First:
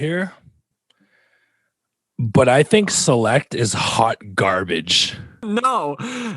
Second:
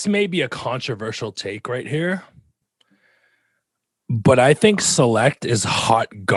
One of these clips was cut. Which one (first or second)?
first